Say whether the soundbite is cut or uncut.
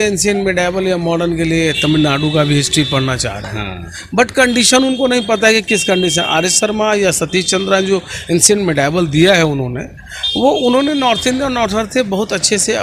uncut